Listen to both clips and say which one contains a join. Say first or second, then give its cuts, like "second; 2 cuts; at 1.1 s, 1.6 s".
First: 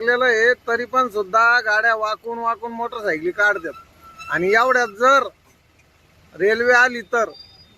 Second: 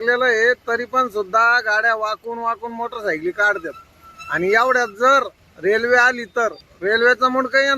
second; 2 cuts; at 5.4 s, 6.7 s